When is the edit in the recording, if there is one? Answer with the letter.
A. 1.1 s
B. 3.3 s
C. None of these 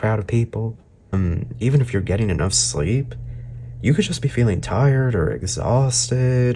A